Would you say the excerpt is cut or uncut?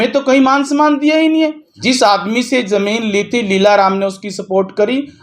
cut